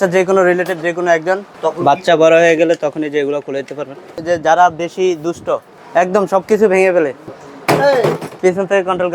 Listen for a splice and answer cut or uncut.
cut